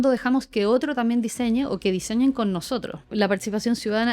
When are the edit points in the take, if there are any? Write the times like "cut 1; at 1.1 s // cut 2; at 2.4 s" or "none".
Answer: cut 1; at 3.0 s